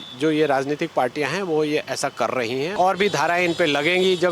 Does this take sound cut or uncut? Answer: cut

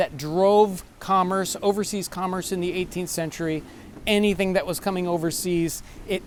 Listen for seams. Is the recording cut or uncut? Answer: uncut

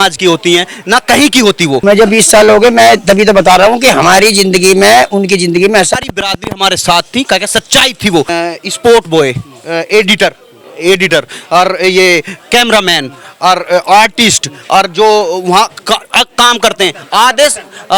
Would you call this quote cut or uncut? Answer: cut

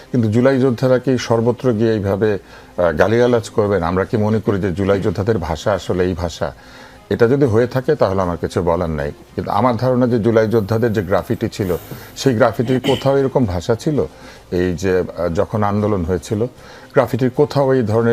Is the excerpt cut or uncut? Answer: uncut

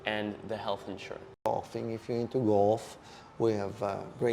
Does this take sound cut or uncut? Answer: cut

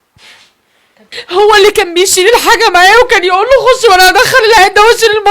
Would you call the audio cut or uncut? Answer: cut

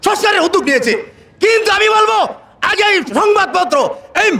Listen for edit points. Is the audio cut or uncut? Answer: uncut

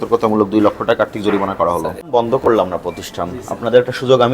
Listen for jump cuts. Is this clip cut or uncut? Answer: cut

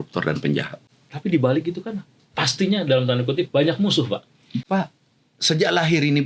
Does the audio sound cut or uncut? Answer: cut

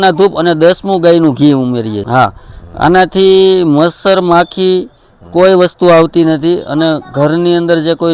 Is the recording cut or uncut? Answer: cut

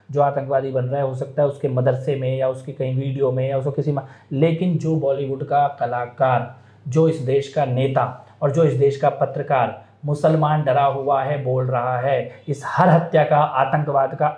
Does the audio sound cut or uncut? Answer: uncut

